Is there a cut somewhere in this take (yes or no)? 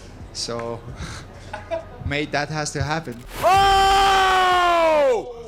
yes